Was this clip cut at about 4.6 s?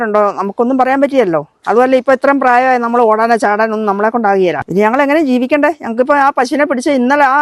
yes; 1 cut; at 4.6 s

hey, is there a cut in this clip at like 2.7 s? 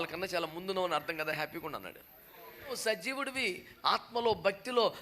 yes; 1 cut; at 2.7 s

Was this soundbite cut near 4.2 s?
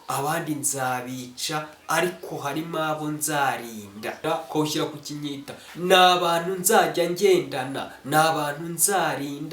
yes; 1 cut; at 4.2 s

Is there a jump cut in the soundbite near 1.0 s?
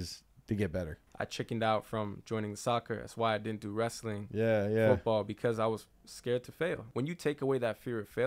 yes; 2 cuts; at 1.0 s, 6.9 s

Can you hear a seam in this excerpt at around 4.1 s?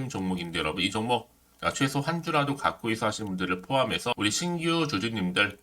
yes; 1 cut; at 4.1 s

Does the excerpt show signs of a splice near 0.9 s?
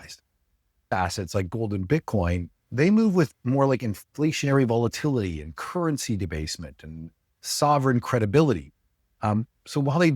yes; 1 cut; at 0.9 s

